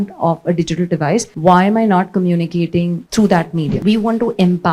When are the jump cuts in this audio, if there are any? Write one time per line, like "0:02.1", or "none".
0:01.3
0:03.0
0:03.7